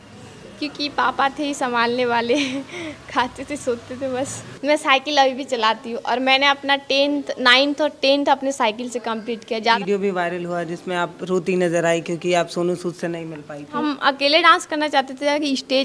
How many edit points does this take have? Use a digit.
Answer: 3